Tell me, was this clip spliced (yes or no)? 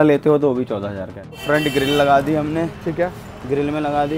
yes